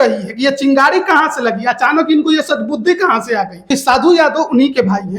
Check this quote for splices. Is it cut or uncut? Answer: cut